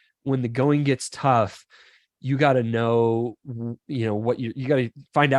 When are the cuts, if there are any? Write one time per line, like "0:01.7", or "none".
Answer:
none